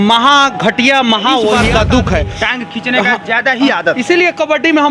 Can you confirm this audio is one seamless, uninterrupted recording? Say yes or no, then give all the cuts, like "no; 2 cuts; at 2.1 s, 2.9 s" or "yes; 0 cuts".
no; 1 cut; at 1.6 s